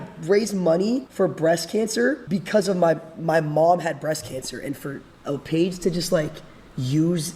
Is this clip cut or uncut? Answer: cut